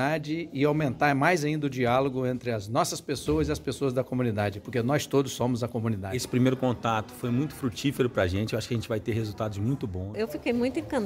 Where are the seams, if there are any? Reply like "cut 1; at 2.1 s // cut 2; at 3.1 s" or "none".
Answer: cut 1; at 6.2 s // cut 2; at 10.0 s